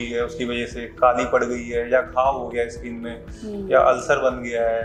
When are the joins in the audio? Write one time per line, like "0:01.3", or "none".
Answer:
none